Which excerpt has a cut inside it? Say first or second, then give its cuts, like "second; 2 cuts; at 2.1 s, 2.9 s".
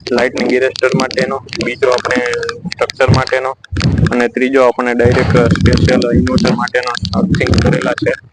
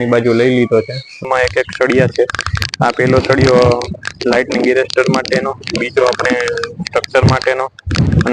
second; 1 cut; at 1.3 s